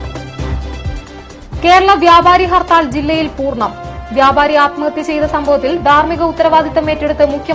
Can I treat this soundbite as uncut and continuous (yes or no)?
no